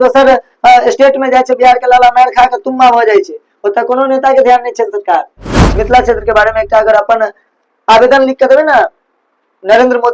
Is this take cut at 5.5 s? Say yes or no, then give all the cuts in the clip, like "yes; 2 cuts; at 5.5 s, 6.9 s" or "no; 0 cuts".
yes; 1 cut; at 5.5 s